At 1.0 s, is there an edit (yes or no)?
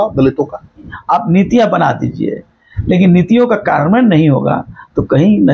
yes